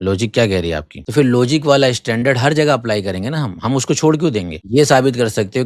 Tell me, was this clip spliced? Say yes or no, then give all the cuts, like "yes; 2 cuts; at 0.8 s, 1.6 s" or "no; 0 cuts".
yes; 2 cuts; at 1.0 s, 4.6 s